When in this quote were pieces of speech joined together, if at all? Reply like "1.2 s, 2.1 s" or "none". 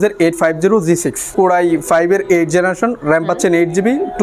1.3 s